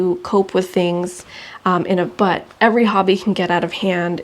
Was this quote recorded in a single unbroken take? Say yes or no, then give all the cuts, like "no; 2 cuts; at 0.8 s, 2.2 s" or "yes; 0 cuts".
no; 1 cut; at 2.1 s